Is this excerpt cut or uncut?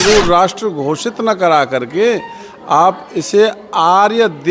uncut